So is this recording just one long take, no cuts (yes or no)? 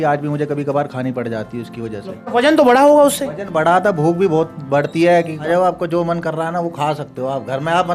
no